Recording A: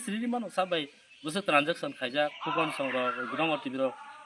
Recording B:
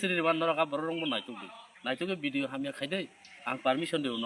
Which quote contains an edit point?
A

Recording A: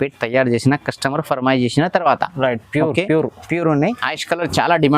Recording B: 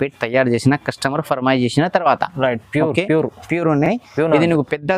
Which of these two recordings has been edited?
A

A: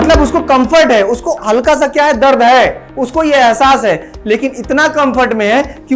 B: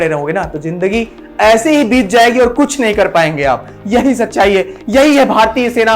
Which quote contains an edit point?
A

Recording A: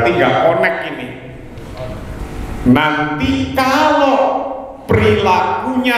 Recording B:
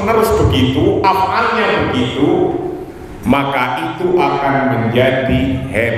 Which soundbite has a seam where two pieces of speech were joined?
A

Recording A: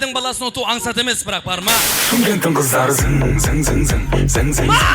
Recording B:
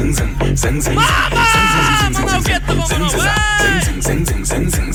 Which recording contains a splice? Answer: A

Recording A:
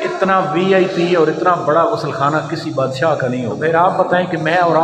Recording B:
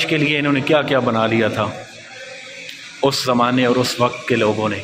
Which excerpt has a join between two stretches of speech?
A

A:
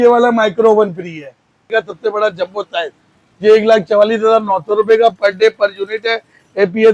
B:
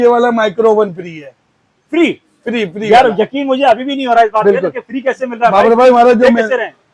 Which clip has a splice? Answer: A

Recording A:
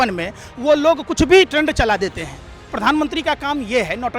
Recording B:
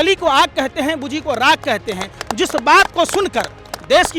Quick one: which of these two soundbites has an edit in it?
A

